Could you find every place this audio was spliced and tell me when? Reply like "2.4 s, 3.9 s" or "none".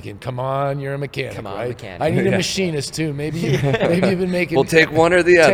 none